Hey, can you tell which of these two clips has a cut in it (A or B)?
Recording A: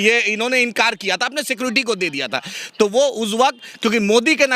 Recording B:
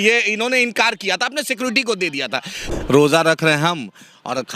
B